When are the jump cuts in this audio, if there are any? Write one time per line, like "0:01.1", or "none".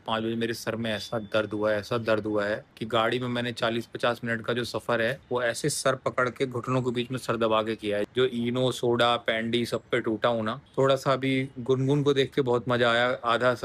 0:08.1
0:10.7